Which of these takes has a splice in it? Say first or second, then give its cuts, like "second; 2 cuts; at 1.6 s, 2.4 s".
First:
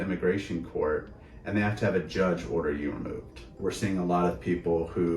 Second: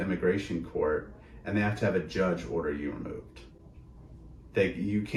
first; 1 cut; at 3.4 s